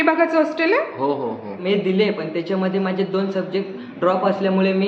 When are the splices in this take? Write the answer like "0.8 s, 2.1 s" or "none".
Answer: 1.5 s